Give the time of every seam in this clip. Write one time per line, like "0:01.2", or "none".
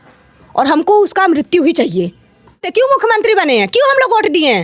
0:02.6